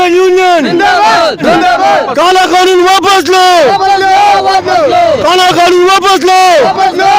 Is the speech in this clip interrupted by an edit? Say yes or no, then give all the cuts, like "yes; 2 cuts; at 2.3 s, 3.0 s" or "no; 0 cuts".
yes; 1 cut; at 1.5 s